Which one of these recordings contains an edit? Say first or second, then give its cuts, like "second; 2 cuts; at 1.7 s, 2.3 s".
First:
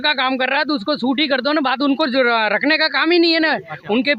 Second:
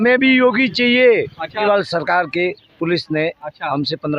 second; 1 cut; at 1.6 s